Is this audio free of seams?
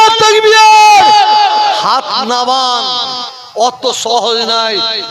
yes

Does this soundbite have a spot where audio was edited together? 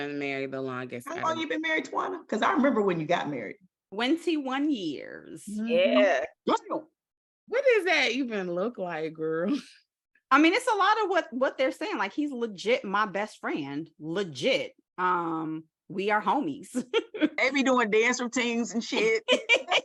no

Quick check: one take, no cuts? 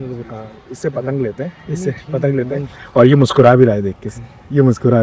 yes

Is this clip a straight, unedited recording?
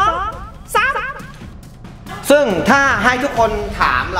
no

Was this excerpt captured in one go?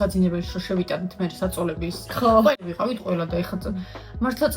no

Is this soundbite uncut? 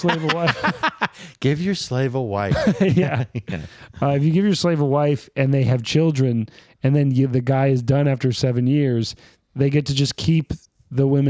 yes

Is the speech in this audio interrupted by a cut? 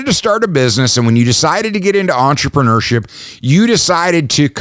no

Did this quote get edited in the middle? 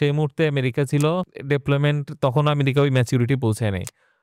yes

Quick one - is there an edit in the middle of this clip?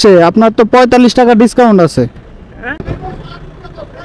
yes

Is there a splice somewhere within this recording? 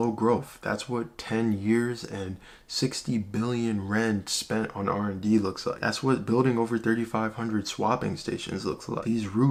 no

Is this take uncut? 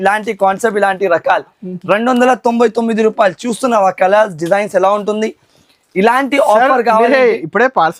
yes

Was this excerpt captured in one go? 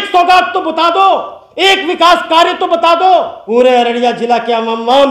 no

